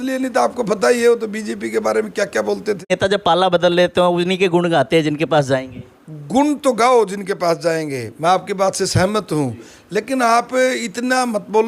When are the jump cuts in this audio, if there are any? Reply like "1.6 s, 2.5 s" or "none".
2.9 s